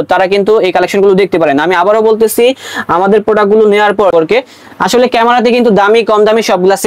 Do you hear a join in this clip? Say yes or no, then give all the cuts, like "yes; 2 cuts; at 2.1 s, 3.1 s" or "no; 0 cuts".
yes; 1 cut; at 4.1 s